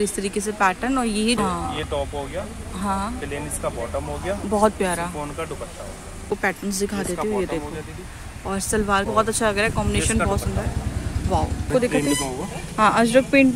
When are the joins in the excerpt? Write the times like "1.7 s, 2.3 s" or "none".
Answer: 1.4 s, 6.2 s, 9.1 s, 11.7 s